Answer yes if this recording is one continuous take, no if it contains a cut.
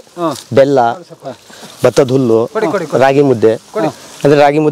yes